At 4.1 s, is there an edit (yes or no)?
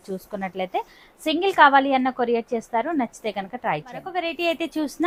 no